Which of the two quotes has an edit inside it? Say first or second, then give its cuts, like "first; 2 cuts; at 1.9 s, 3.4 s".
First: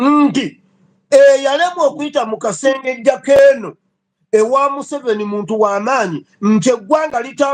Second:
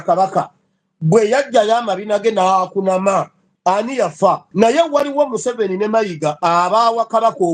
second; 2 cuts; at 3.4 s, 4.5 s